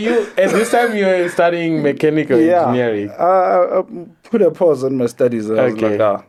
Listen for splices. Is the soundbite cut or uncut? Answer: uncut